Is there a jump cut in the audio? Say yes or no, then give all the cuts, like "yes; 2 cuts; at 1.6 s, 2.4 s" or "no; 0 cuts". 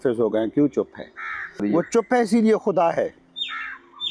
yes; 1 cut; at 1.6 s